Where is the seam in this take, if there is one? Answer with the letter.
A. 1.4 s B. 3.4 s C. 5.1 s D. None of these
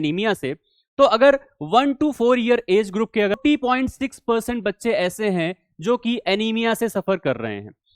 B